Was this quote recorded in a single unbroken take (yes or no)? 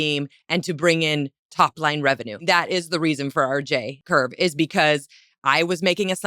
no